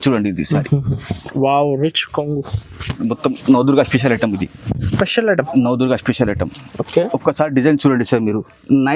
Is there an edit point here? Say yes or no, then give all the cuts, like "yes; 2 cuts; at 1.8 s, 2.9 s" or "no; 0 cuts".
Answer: yes; 1 cut; at 3.0 s